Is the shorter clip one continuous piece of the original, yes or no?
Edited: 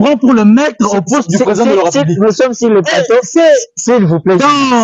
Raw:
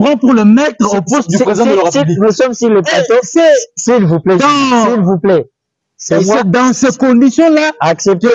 yes